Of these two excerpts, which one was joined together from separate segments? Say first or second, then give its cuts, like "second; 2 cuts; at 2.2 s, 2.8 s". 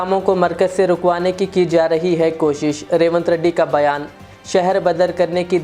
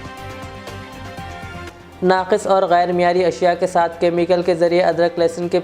second; 1 cut; at 1.7 s